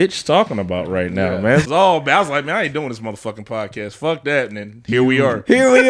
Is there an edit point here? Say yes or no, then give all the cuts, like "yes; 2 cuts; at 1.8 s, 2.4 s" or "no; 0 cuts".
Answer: yes; 1 cut; at 1.7 s